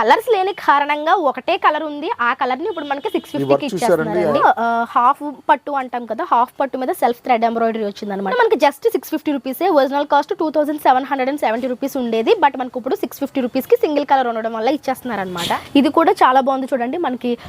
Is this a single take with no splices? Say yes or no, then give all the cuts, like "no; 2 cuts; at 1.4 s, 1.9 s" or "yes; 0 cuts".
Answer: no; 3 cuts; at 4.4 s, 8.3 s, 15.5 s